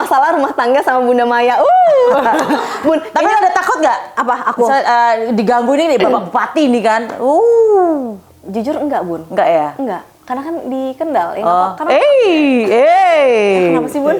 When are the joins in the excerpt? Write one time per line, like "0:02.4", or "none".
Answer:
none